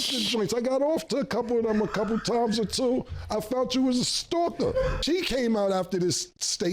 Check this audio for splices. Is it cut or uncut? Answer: cut